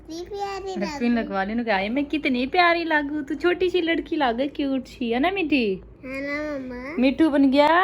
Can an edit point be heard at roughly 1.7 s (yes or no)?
yes